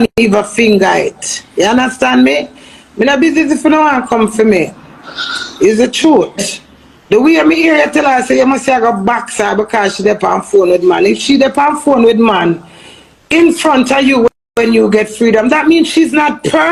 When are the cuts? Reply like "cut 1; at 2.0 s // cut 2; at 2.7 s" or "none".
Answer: none